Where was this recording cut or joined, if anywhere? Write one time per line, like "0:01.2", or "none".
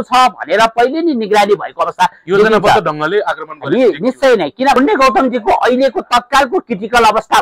0:04.8